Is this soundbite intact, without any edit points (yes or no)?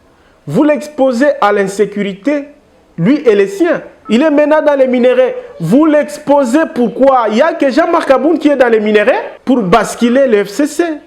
no